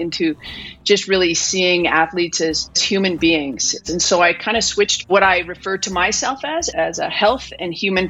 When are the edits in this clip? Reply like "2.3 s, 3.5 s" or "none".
2.8 s, 3.8 s, 5.1 s, 6.7 s